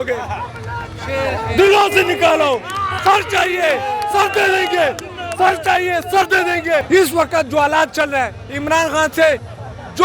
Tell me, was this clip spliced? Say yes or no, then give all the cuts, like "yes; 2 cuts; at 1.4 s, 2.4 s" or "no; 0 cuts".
yes; 1 cut; at 6.8 s